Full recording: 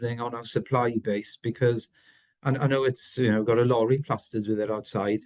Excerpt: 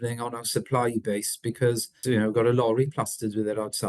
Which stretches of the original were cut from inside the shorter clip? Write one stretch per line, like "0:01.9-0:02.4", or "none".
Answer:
0:01.9-0:03.1